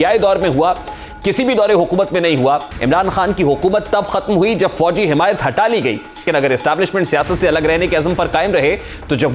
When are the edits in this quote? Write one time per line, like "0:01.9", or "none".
0:02.7
0:06.3